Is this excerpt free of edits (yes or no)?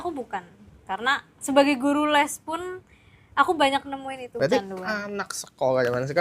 no